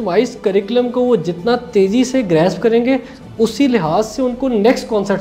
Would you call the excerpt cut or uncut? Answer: uncut